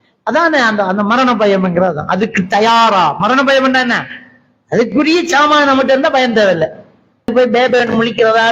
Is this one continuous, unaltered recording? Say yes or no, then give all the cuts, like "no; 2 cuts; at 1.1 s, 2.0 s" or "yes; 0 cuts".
no; 1 cut; at 7.3 s